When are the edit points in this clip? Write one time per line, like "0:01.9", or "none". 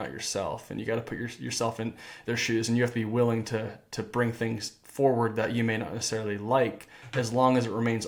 none